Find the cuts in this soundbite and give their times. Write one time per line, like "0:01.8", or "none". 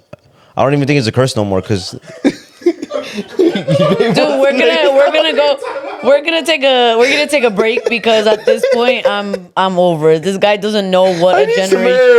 none

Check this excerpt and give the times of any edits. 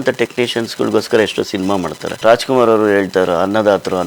0:02.1

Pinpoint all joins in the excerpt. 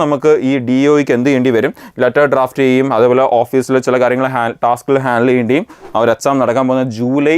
0:05.8

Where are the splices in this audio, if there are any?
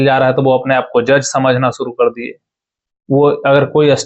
none

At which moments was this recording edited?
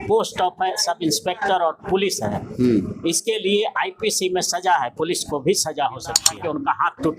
0:06.3

